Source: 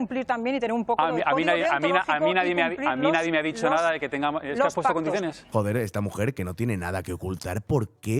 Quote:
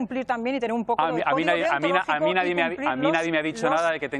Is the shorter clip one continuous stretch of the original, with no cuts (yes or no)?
yes